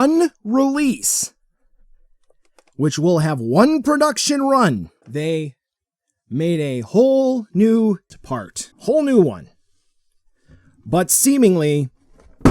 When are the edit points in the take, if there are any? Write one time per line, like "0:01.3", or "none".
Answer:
0:05.0
0:08.1